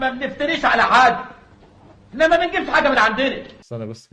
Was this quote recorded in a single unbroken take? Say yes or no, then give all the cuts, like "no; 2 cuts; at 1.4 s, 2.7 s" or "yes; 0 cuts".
yes; 0 cuts